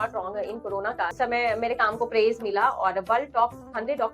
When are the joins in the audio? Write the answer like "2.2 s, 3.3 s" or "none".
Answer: 1.1 s